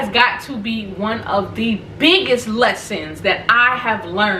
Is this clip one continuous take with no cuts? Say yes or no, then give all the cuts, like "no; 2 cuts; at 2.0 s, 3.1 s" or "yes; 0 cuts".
yes; 0 cuts